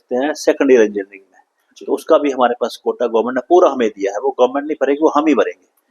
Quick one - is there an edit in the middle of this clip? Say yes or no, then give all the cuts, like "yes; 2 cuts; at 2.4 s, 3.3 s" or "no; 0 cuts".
no; 0 cuts